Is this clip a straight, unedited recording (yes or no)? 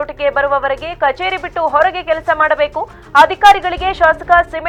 yes